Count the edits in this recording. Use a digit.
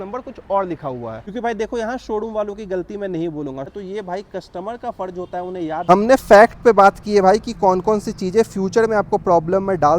3